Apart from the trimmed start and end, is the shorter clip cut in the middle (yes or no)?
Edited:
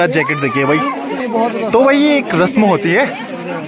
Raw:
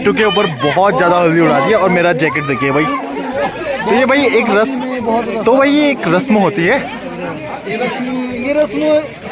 yes